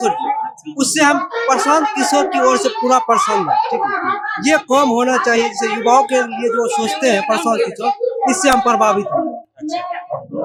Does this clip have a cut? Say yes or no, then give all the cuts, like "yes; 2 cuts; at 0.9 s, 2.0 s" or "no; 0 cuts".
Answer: no; 0 cuts